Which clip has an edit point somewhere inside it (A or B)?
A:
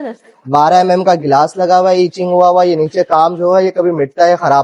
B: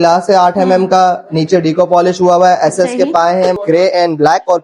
B